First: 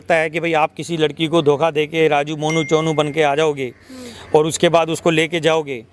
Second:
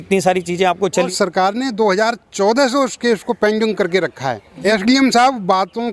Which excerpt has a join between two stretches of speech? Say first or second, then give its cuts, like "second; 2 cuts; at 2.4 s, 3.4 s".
second; 2 cuts; at 1.1 s, 4.5 s